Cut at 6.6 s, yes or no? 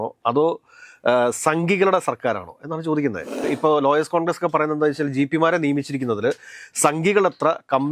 no